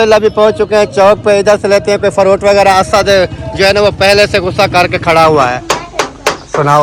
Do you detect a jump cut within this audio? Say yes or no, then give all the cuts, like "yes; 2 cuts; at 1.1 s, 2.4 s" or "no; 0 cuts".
yes; 1 cut; at 5.6 s